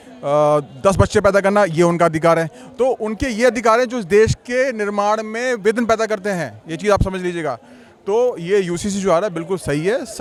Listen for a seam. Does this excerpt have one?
no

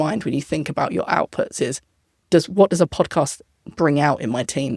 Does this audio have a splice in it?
no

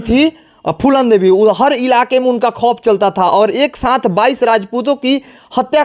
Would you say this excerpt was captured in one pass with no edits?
yes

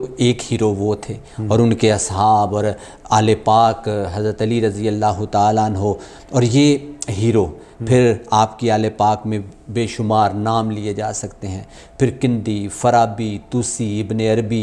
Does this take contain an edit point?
no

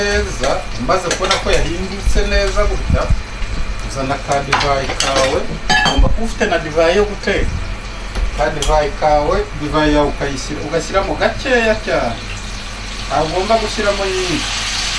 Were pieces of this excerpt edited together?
no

